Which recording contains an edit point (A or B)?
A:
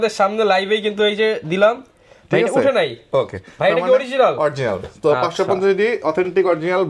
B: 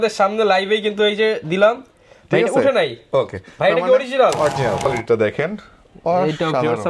B